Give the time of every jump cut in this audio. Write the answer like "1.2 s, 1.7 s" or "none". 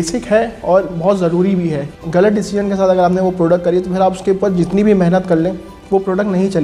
1.9 s

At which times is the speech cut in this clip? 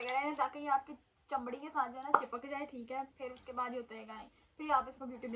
none

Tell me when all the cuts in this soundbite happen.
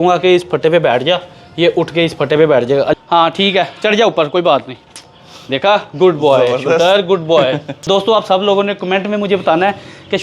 2.9 s, 7.7 s

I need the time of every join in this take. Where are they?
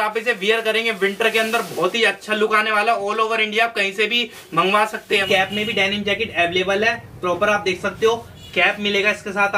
5.2 s

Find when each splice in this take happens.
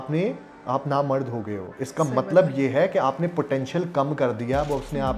none

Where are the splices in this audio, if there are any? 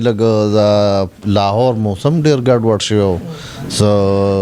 none

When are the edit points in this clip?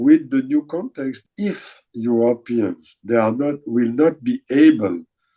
1.2 s

